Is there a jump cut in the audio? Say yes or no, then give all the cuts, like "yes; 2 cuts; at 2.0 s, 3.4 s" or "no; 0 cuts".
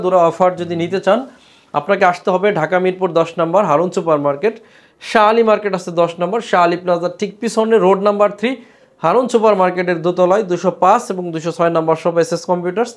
no; 0 cuts